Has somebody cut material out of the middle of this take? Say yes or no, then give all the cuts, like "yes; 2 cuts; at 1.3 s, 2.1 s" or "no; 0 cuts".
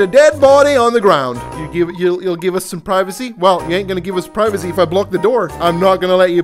yes; 2 cuts; at 1.5 s, 5.6 s